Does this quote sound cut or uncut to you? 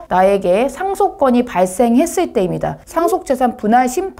cut